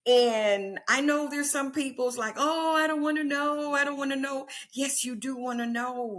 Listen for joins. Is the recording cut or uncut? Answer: uncut